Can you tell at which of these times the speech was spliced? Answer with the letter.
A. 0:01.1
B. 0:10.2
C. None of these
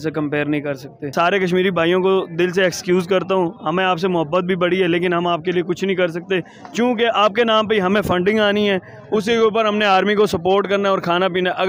A